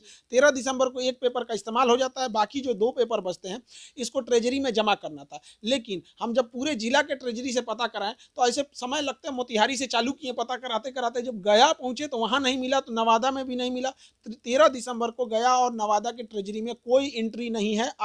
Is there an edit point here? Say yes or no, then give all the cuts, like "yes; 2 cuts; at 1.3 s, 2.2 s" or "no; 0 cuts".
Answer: no; 0 cuts